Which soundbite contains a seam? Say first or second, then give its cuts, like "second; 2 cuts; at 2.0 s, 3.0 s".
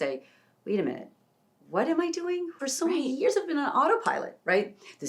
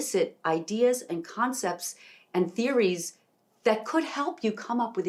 first; 1 cut; at 2.5 s